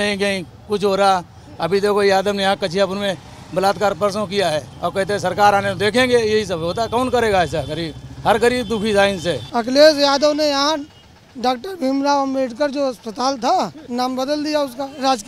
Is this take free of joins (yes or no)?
no